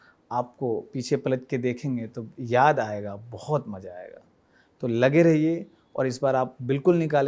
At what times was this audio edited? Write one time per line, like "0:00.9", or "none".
none